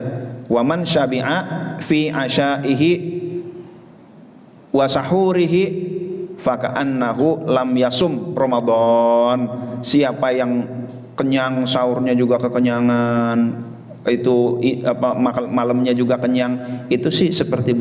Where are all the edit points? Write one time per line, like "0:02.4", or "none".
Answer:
none